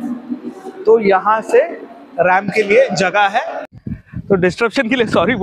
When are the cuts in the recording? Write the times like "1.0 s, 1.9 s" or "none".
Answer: 3.8 s

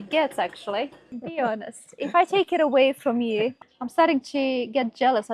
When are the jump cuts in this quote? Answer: 1.2 s, 3.5 s

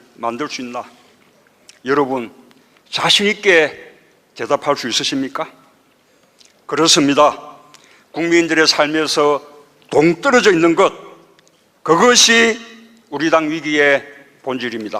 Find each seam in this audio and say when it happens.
1.2 s

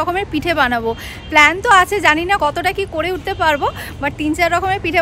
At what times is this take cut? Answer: none

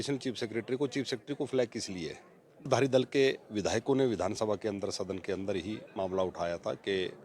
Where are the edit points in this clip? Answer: 2.7 s

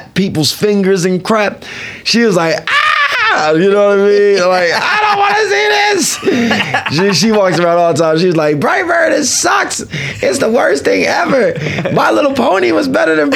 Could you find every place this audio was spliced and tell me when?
none

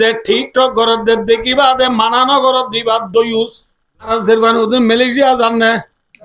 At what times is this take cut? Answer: 4.1 s

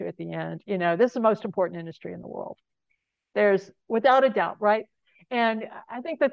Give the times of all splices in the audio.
none

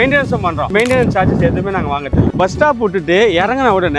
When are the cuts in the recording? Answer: 2.3 s

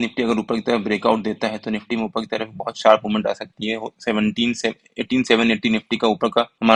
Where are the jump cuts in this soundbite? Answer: none

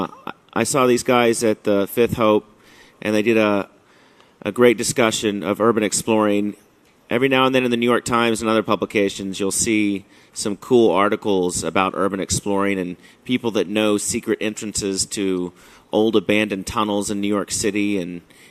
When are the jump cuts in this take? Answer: none

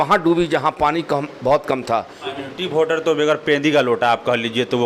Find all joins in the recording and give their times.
2.2 s

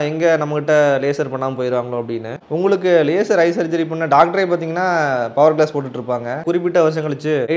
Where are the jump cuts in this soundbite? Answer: 2.3 s, 6.4 s

